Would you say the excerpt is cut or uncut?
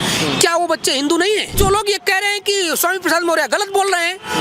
cut